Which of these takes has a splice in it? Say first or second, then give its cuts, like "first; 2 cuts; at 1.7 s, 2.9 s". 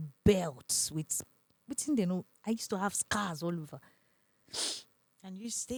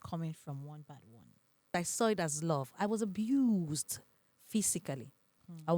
second; 1 cut; at 1.8 s